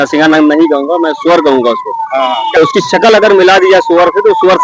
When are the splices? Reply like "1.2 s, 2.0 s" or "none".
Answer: 2.6 s

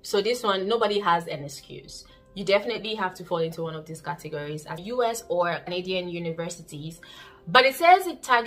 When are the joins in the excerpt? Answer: 4.8 s, 5.7 s

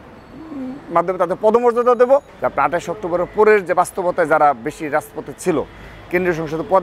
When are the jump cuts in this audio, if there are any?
2.4 s

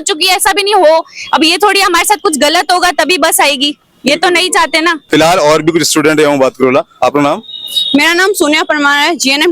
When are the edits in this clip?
none

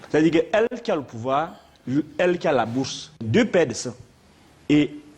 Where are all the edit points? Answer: 3.2 s

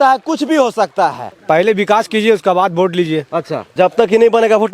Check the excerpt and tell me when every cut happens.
1.3 s, 3.6 s

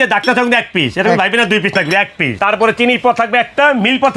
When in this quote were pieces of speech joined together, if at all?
2.4 s

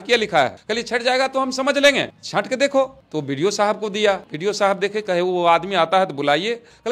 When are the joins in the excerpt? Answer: 4.3 s

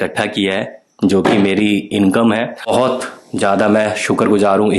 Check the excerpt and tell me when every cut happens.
2.6 s

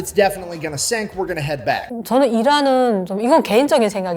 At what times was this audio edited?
1.9 s

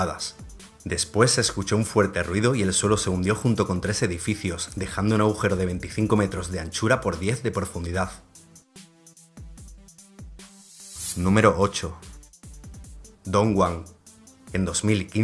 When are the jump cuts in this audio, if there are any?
none

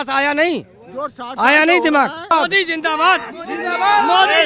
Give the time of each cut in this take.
2.3 s

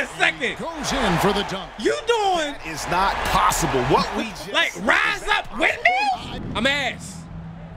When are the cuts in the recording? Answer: 6.3 s

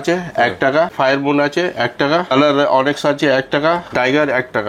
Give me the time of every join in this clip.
0.9 s, 2.3 s, 3.9 s

